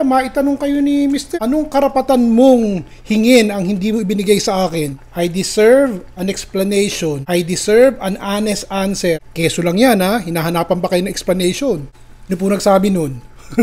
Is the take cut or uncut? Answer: cut